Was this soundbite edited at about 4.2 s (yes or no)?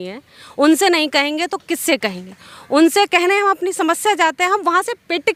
no